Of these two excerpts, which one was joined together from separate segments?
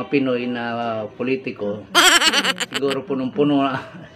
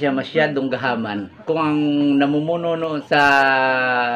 second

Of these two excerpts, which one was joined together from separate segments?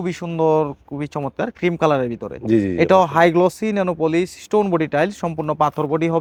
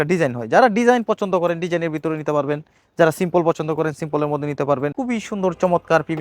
second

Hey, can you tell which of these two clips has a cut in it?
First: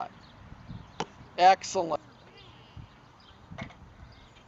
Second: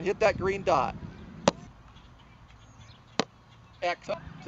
second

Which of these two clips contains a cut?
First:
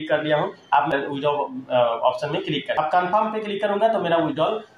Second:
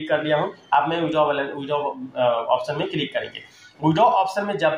first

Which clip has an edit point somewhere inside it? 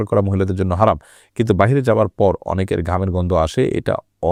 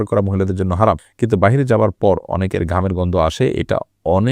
second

